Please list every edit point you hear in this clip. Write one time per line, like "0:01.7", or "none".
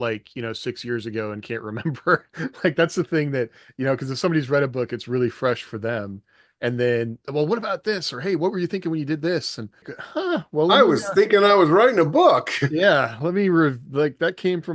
0:10.0